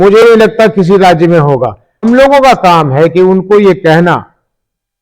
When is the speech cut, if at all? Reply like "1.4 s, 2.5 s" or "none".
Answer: 2.0 s